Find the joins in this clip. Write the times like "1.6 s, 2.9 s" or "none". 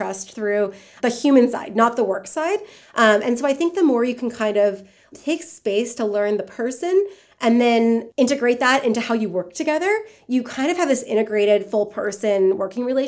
none

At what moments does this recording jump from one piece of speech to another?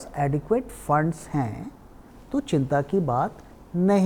none

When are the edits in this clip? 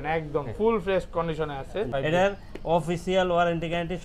1.9 s

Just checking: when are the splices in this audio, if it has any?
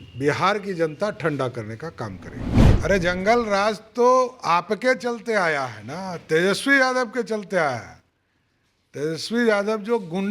2.7 s

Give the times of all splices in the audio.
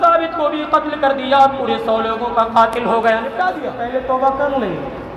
3.7 s

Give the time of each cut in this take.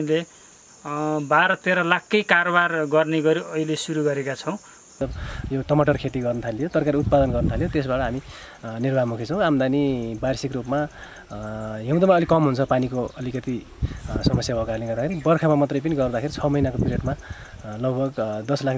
5.0 s

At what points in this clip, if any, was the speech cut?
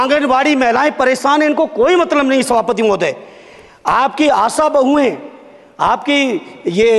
none

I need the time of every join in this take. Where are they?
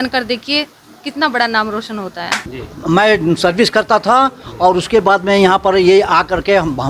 2.6 s

